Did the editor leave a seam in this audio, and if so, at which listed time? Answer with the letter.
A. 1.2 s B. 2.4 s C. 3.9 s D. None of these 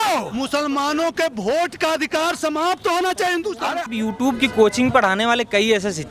C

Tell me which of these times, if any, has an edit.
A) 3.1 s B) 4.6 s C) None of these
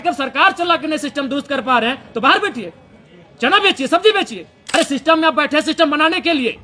B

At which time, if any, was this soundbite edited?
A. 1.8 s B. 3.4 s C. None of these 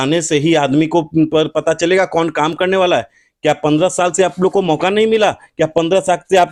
C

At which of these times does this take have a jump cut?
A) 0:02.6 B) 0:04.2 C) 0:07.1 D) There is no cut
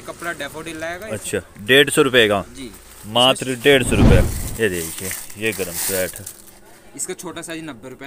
B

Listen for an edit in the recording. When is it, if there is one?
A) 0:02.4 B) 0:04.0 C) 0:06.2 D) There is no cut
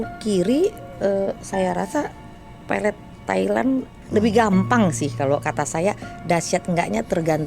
B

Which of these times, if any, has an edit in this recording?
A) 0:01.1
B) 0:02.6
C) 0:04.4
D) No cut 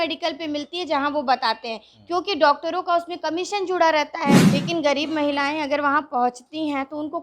C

